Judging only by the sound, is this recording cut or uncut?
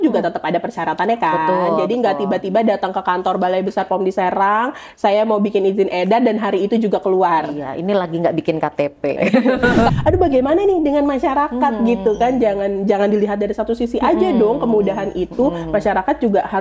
cut